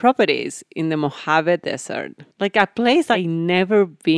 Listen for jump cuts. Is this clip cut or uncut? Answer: cut